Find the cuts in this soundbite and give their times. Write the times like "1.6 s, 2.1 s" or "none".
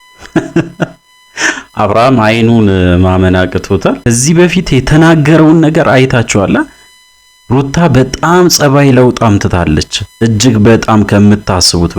4.0 s